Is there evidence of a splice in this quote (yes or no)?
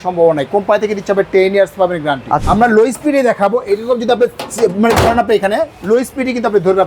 yes